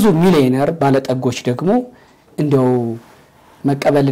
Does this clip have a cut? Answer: no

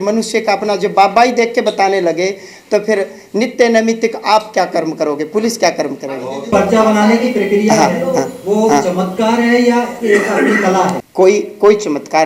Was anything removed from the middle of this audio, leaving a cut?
yes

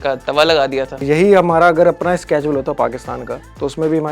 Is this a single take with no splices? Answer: no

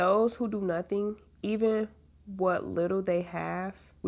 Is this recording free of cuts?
yes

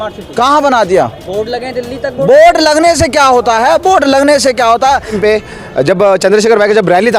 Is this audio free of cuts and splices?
no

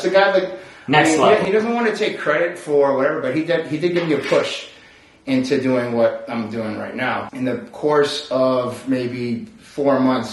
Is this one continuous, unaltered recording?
no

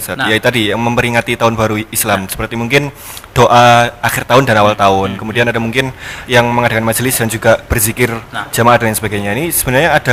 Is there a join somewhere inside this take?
no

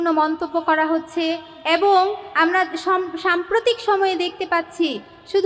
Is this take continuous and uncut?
yes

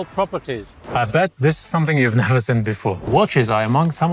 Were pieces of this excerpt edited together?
yes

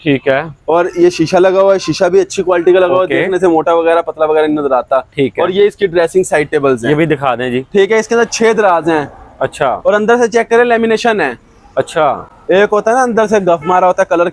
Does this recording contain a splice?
no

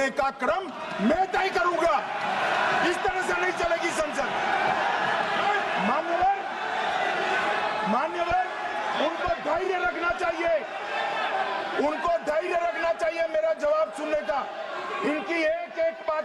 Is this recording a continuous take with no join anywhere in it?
yes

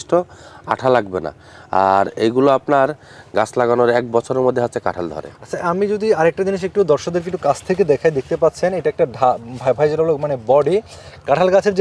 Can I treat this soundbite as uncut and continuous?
yes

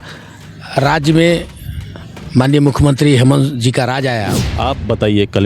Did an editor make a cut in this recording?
yes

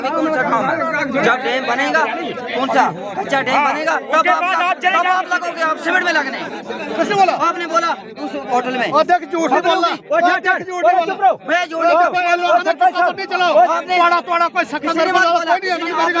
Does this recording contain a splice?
no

